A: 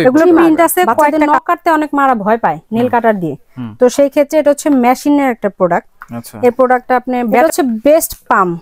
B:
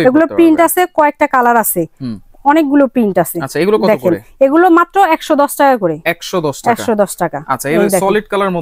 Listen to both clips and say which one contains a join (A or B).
A